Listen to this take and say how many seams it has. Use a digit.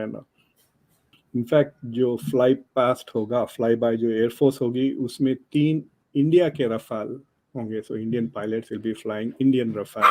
1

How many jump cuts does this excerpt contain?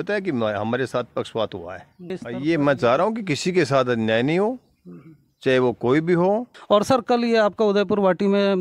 2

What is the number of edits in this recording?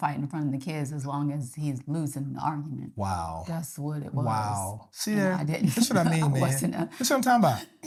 0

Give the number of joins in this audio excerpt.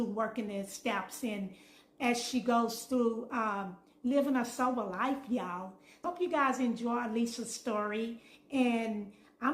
1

